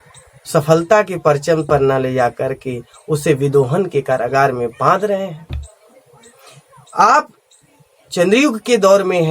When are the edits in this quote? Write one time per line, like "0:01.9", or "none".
none